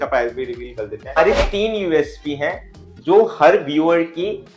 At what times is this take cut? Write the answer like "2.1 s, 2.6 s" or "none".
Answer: 1.2 s